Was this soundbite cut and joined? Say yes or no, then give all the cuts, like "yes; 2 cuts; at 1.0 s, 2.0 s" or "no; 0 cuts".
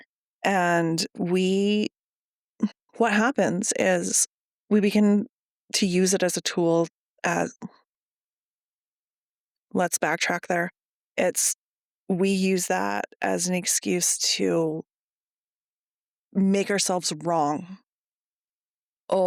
no; 0 cuts